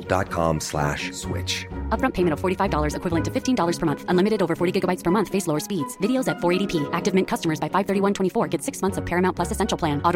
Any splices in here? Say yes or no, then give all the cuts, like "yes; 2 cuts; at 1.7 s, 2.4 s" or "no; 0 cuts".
no; 0 cuts